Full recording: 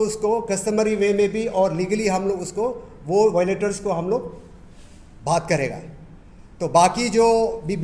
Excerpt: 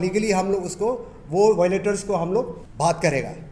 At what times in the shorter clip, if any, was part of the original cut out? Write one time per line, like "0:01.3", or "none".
0:02.6